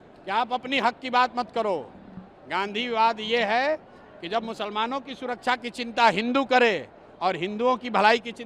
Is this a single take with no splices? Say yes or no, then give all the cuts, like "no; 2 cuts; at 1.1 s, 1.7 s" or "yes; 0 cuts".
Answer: yes; 0 cuts